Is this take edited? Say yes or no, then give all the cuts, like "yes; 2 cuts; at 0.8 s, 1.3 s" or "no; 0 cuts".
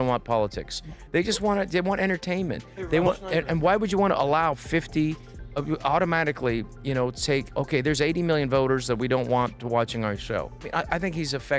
yes; 1 cut; at 10.7 s